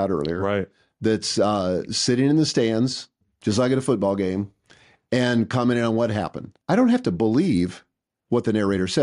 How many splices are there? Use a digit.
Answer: 1